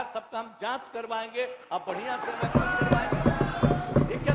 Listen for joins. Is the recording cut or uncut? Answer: uncut